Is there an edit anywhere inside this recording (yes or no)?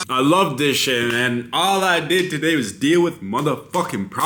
no